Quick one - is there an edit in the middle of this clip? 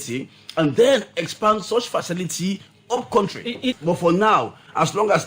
yes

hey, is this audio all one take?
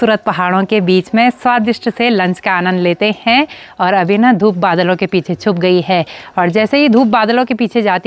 yes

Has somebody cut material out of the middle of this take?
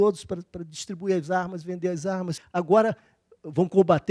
yes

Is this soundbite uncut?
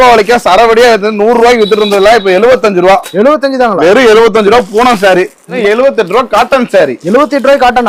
no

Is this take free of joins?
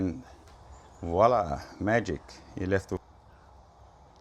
no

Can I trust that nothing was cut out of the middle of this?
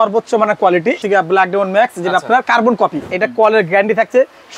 no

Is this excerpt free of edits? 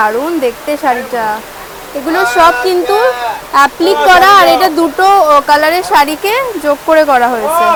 yes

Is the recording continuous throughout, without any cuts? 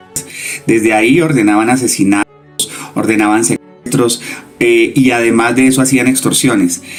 yes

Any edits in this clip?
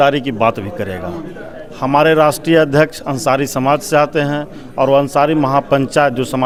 no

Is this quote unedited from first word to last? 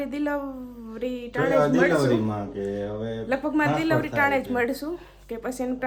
yes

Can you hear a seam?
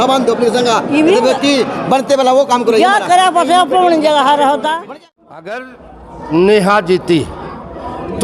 yes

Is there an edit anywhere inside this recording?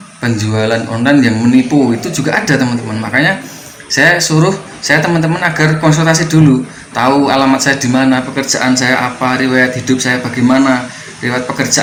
no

